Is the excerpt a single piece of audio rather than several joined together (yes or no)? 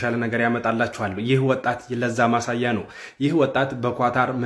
yes